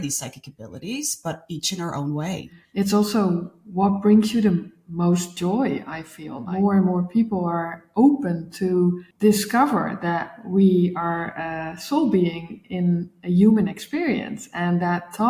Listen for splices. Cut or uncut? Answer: cut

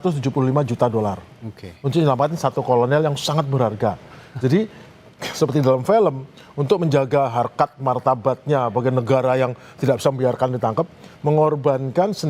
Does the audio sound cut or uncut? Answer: uncut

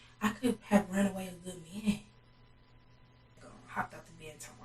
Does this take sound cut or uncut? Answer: cut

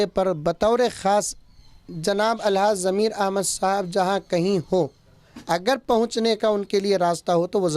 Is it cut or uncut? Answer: uncut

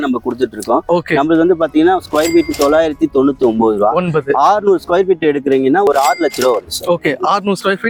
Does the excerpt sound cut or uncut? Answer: uncut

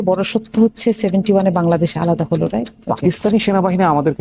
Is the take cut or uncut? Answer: cut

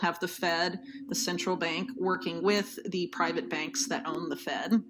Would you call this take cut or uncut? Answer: uncut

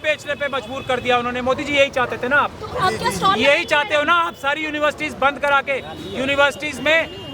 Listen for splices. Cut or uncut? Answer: uncut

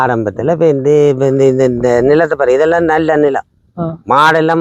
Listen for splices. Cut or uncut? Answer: uncut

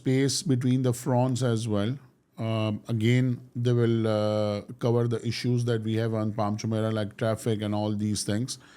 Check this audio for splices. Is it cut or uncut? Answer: uncut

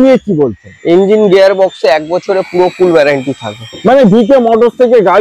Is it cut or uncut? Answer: uncut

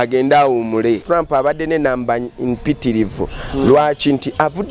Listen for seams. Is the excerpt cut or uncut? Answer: cut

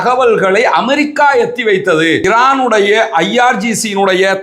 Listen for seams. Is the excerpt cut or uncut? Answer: cut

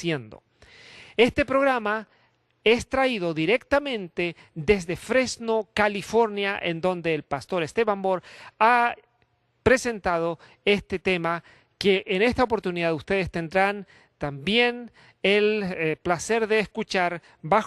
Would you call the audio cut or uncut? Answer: cut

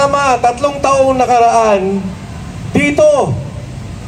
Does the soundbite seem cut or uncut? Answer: uncut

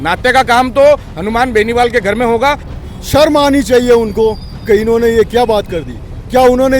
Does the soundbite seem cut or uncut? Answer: cut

